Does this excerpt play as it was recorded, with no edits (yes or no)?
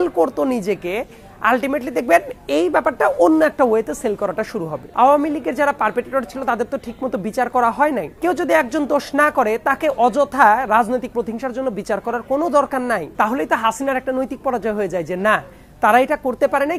no